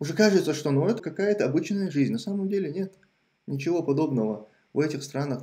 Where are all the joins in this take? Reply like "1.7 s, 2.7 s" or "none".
1.1 s